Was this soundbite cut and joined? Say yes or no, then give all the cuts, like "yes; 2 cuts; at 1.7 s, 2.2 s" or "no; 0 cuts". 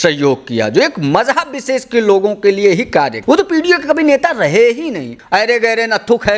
yes; 2 cuts; at 3.2 s, 5.1 s